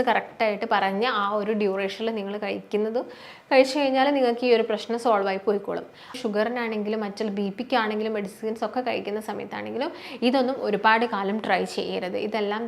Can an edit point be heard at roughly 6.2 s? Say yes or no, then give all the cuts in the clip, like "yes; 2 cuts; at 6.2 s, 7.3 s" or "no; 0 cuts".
yes; 1 cut; at 6.2 s